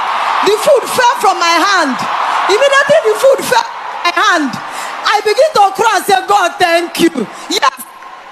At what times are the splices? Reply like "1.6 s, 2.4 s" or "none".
none